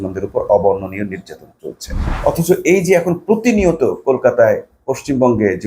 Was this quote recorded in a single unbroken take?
no; 1 cut; at 2.0 s

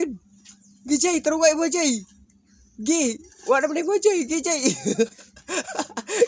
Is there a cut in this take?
yes; 1 cut; at 4.5 s

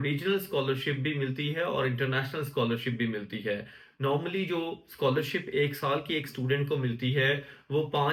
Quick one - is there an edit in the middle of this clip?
no; 0 cuts

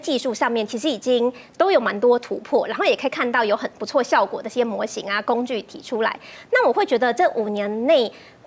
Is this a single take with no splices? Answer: yes; 0 cuts

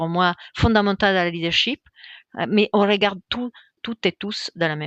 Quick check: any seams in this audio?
yes; 1 cut; at 3.6 s

